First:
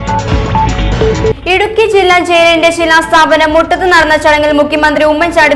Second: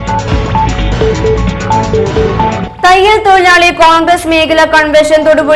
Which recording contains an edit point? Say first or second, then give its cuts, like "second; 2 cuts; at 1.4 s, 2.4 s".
first; 1 cut; at 1.3 s